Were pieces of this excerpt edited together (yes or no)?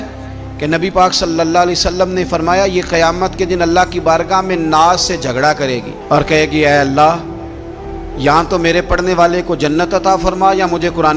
no